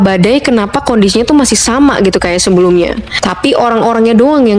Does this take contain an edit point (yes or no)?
no